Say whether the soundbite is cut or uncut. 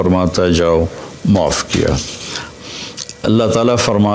cut